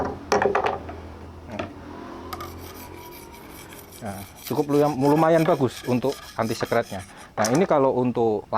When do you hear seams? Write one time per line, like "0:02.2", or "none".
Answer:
none

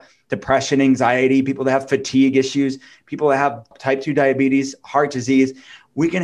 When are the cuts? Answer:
0:03.7

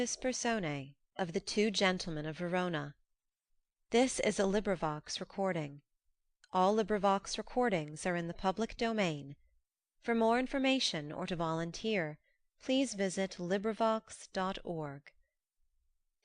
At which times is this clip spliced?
0:01.0

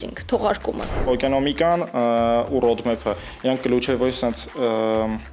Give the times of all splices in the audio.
0:01.0

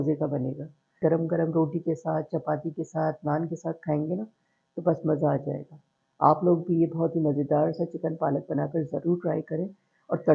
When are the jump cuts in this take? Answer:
0:01.0

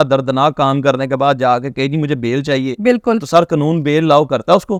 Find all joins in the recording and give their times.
none

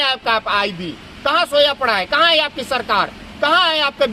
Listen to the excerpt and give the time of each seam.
none

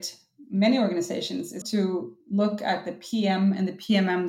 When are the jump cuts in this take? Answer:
0:01.6

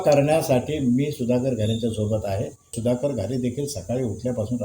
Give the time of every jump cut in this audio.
0:02.7

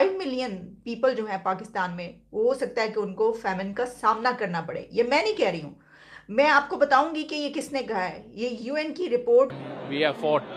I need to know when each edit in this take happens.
0:09.5

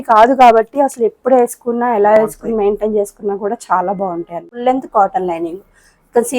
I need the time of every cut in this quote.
0:04.6

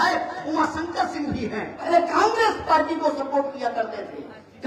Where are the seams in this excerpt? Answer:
0:01.9

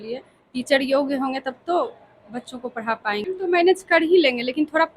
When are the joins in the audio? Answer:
0:03.2

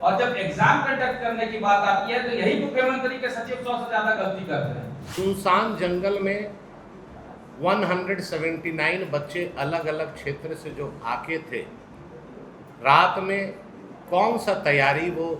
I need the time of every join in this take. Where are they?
0:05.1

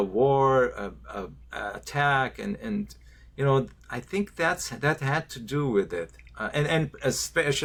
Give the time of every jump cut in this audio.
none

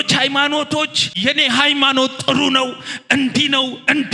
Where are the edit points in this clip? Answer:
0:01.1

